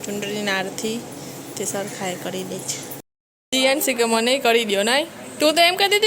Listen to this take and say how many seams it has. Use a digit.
1